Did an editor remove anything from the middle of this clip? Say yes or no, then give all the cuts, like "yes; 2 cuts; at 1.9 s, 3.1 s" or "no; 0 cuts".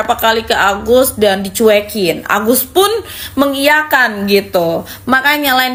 no; 0 cuts